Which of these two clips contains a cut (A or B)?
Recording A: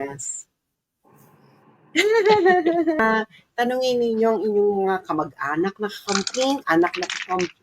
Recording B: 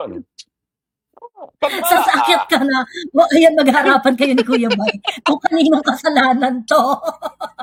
A